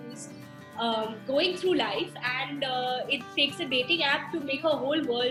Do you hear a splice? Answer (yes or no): no